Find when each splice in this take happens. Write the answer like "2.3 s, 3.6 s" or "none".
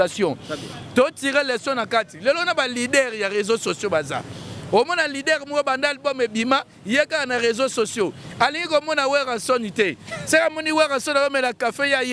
none